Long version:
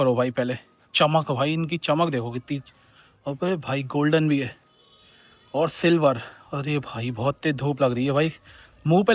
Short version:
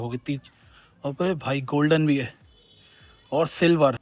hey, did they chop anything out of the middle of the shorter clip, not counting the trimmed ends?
no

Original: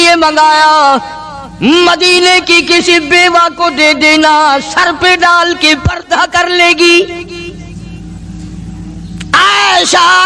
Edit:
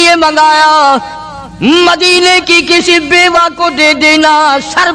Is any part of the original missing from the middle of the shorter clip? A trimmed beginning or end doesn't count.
no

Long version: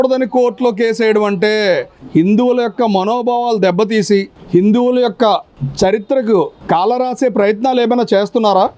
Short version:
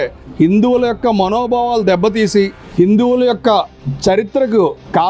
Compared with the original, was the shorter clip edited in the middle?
no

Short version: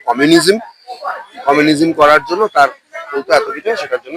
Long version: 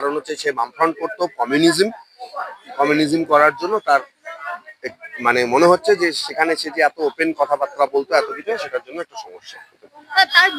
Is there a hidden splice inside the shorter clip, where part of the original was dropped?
yes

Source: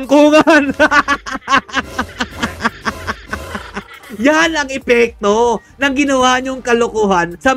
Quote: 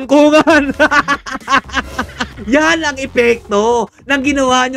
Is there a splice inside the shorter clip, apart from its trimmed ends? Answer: yes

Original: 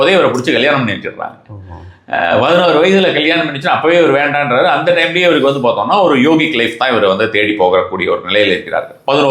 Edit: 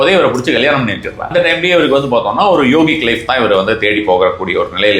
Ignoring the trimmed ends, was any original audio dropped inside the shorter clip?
yes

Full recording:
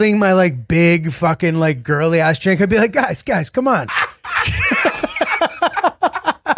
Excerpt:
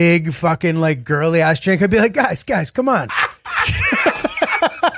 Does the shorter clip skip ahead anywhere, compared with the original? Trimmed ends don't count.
no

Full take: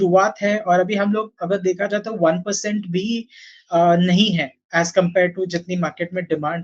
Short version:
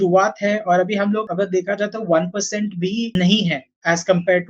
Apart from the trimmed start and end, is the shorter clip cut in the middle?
yes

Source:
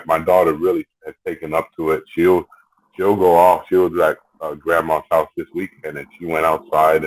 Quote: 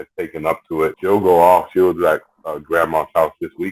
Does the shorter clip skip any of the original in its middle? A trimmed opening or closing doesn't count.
yes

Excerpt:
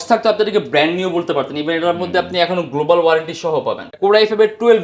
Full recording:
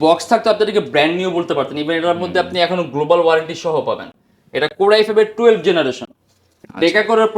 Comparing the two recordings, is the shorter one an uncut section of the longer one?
no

